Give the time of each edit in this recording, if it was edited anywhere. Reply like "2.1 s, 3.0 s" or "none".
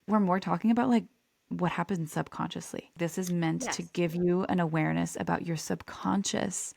2.9 s